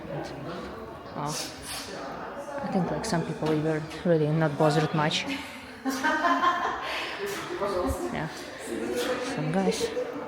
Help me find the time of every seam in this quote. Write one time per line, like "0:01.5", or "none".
none